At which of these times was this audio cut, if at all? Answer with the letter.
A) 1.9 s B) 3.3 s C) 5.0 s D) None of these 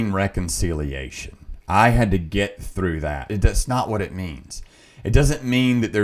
B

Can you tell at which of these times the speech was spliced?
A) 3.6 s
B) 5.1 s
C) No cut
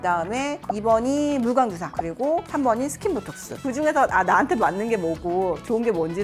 A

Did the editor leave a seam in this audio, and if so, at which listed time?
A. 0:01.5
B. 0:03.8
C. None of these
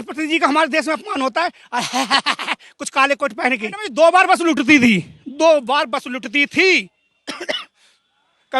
B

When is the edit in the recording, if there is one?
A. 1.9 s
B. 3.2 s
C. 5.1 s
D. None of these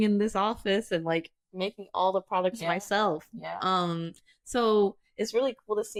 D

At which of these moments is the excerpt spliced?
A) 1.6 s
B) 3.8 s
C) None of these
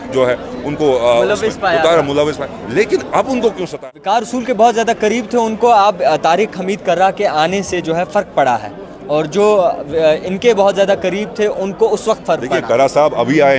B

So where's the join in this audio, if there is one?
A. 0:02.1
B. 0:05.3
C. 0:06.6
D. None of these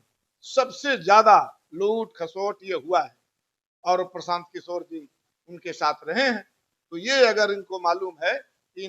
D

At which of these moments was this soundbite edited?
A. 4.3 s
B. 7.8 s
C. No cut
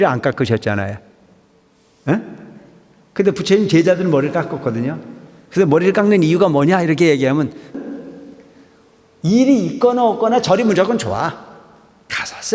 B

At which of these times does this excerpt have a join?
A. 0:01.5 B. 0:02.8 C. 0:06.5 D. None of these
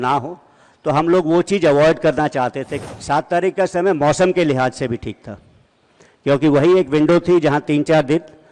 B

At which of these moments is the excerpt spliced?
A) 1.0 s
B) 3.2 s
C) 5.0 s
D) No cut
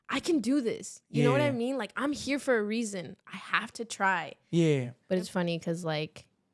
C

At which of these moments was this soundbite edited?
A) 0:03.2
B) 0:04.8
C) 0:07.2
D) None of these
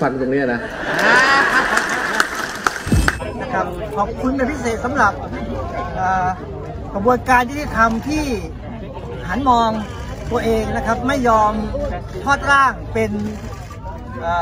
A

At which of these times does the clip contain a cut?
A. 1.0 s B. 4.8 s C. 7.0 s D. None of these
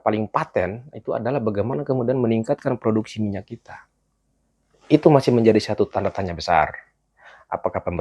D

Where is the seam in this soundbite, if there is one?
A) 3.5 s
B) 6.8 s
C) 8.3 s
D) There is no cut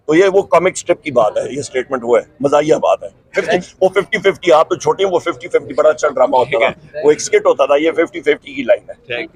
D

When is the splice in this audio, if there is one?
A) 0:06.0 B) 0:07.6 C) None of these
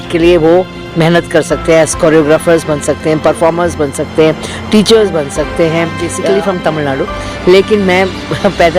A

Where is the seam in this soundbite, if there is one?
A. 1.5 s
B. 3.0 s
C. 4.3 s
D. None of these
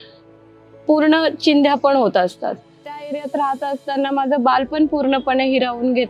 B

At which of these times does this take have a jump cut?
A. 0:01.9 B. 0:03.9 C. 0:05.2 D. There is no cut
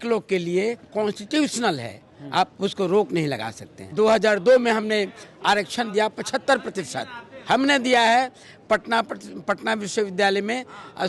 B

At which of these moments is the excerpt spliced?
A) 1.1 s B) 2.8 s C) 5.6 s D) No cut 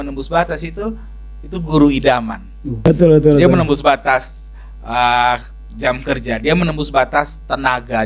B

